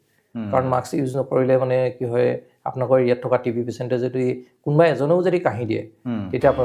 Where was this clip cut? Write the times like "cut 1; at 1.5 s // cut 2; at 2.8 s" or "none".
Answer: none